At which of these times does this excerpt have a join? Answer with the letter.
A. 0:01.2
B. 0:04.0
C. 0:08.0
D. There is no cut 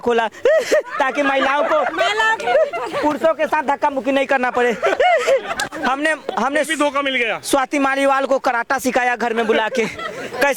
D